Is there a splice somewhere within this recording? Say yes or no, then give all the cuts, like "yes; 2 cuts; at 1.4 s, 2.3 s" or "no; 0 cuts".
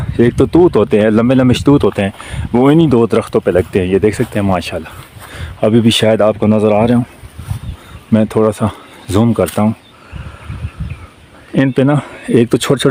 no; 0 cuts